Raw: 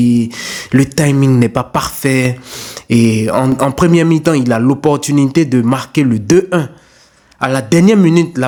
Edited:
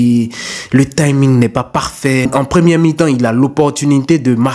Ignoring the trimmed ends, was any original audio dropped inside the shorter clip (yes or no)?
yes